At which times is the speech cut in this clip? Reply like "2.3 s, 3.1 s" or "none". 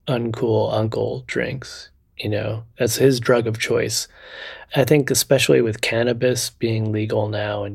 4.6 s